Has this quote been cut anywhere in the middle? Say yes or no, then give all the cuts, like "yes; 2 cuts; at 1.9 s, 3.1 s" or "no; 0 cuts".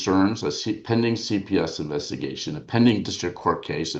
no; 0 cuts